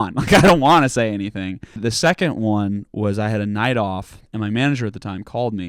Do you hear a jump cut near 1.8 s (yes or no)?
yes